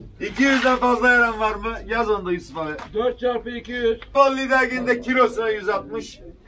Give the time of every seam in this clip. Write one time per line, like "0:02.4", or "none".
0:04.1